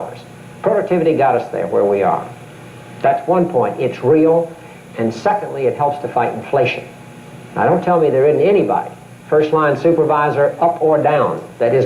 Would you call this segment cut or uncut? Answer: cut